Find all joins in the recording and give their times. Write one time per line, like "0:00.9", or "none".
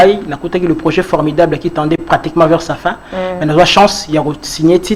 none